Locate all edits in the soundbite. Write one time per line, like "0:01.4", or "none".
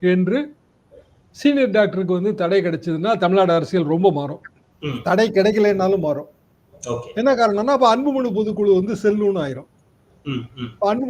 none